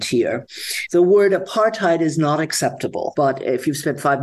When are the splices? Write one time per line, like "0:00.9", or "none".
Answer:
0:03.1